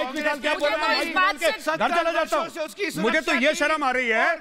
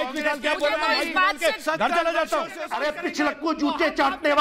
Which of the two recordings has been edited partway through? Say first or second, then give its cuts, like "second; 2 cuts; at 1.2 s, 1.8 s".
second; 1 cut; at 2.6 s